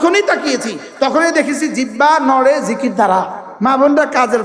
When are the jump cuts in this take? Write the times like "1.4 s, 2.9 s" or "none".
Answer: 3.4 s